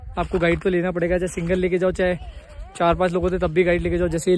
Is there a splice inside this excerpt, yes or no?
no